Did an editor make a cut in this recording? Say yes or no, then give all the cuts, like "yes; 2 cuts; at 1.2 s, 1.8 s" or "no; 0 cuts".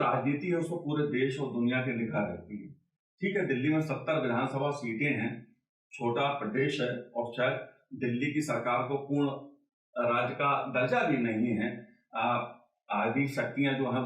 no; 0 cuts